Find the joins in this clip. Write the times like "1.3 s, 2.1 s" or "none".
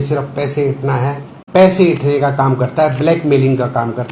1.4 s